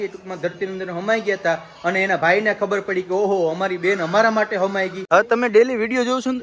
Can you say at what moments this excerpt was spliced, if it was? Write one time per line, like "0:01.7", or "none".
0:05.0